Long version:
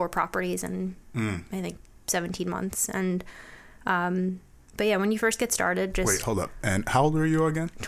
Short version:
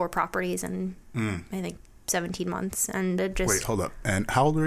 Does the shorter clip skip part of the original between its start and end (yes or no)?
yes